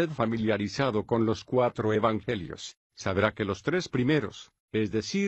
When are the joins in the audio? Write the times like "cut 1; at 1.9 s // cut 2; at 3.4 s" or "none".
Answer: cut 1; at 1.0 s